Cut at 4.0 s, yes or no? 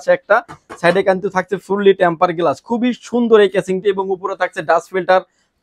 no